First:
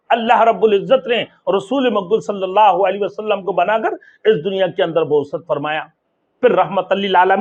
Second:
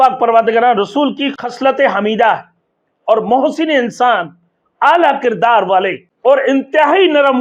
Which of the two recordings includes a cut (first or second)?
second